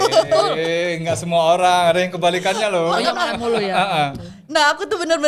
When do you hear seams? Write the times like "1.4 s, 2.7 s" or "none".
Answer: none